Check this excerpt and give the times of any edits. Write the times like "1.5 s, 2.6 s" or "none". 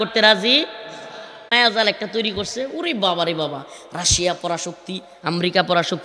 1.5 s